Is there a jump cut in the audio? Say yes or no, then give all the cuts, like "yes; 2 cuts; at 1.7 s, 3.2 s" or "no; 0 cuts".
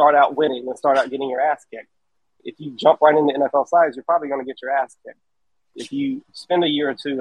yes; 2 cuts; at 2.3 s, 5.7 s